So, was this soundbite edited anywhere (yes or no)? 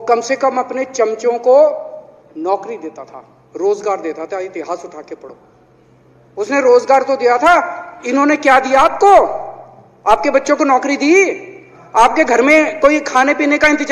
no